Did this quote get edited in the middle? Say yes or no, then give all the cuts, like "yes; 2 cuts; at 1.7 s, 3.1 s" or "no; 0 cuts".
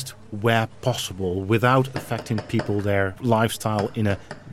yes; 1 cut; at 3.2 s